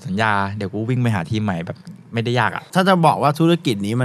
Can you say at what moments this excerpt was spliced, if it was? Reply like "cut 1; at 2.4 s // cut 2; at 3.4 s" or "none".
cut 1; at 2.6 s